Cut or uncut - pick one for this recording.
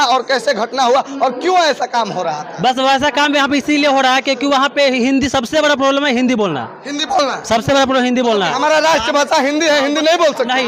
uncut